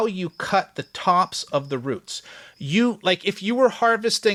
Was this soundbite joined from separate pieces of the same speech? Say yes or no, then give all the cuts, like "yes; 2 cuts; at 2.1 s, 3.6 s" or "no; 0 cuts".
no; 0 cuts